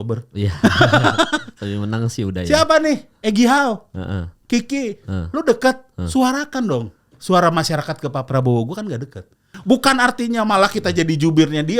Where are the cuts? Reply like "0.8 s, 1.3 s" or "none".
9.6 s